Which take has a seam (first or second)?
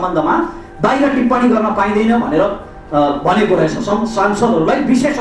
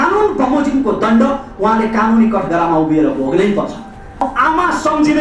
second